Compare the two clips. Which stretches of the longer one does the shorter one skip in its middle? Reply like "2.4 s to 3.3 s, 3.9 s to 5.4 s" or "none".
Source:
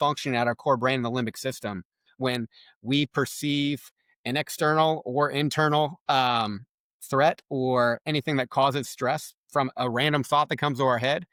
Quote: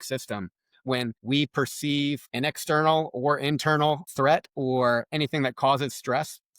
2.5 s to 2.8 s, 3.9 s to 4.2 s, 6.0 s to 7.0 s